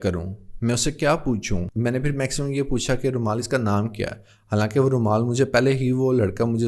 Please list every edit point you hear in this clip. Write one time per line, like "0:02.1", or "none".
0:01.7